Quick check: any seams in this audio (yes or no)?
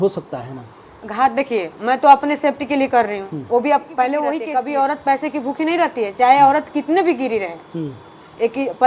yes